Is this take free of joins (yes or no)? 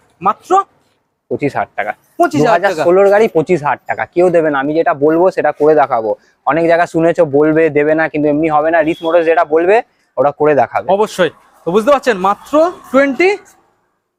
yes